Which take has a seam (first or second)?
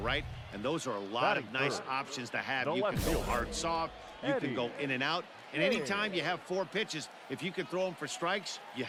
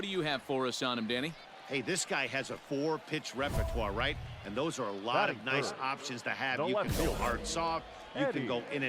second